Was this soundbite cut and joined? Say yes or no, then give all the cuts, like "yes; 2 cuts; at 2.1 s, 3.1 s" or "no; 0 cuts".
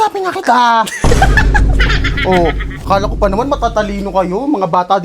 yes; 1 cut; at 2.7 s